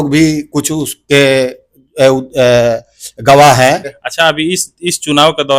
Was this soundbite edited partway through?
yes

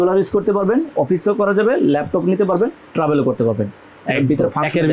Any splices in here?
no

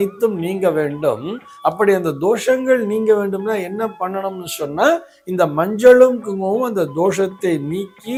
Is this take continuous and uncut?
yes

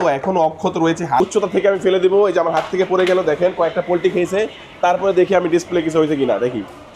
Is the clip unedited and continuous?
no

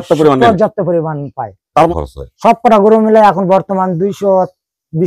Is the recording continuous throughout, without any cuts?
no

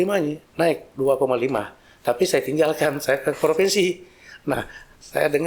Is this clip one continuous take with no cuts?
yes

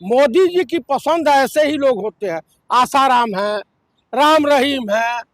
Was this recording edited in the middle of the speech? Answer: no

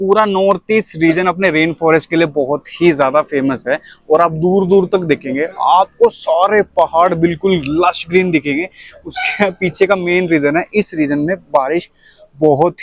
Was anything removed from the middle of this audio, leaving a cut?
no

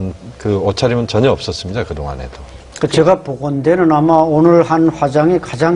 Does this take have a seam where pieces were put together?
yes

